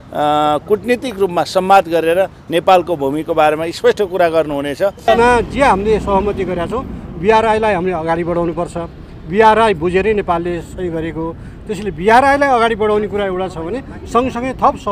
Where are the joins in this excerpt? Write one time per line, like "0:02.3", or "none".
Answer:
0:05.1